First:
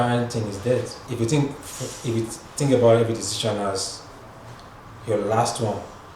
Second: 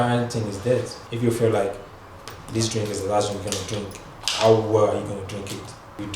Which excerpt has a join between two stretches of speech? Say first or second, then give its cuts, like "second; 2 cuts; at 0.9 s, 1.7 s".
second; 1 cut; at 1.0 s